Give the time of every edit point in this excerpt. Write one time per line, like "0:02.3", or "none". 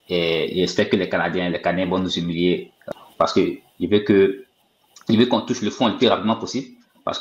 0:02.8